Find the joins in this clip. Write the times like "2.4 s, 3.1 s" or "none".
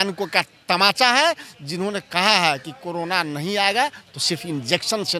none

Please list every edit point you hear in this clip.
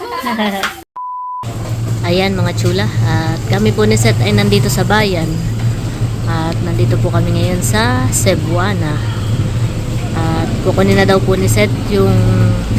none

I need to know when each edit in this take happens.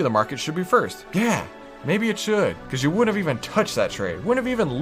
1.0 s, 2.7 s

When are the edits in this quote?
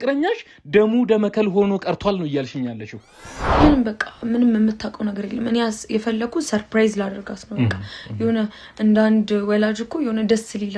3.2 s

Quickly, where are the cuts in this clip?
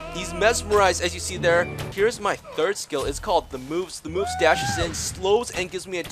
1.9 s

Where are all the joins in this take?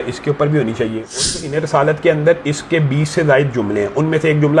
1.3 s

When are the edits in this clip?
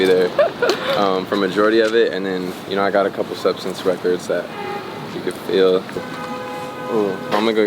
6.0 s

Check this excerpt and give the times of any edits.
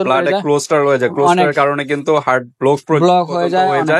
none

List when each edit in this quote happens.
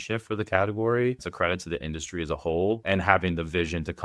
1.2 s, 2.8 s

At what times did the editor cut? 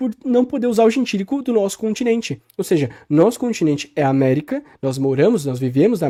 none

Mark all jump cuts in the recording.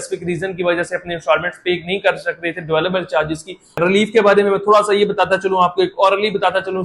3.8 s

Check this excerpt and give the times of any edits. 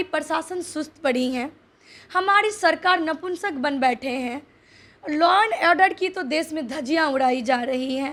none

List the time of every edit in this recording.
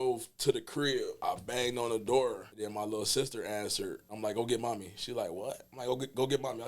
1.2 s, 2.5 s, 4.1 s

